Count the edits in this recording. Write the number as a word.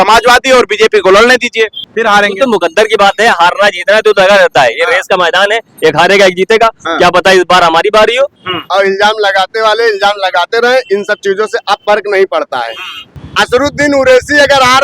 three